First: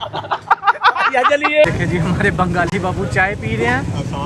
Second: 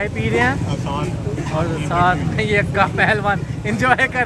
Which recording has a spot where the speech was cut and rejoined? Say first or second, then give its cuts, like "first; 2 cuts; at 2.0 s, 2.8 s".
first; 1 cut; at 1.6 s